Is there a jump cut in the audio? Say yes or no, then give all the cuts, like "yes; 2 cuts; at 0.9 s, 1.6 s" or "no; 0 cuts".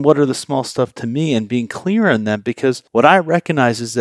yes; 1 cut; at 2.8 s